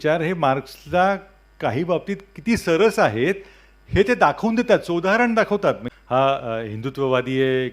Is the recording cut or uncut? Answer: cut